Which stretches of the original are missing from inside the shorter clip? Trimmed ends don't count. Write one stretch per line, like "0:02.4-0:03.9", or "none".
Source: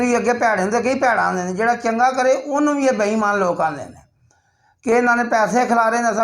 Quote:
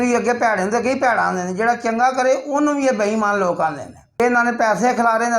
0:04.2-0:04.9